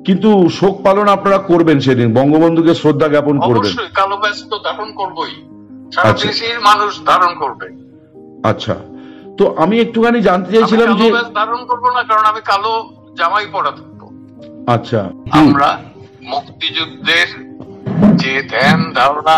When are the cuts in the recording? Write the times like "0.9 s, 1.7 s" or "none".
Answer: 15.2 s